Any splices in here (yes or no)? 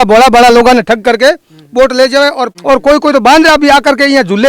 yes